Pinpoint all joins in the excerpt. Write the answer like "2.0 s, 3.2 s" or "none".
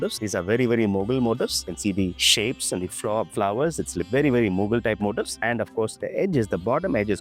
none